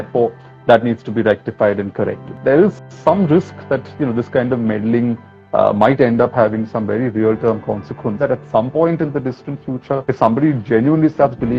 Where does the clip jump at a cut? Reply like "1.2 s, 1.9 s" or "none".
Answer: 2.3 s, 8.2 s, 10.0 s